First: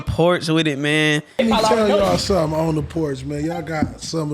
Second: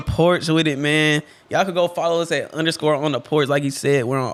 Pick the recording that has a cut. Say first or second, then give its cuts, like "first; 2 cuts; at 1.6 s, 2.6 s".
first; 1 cut; at 1.4 s